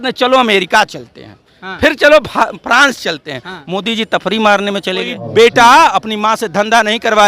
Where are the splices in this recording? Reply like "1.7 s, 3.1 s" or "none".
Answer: 5.2 s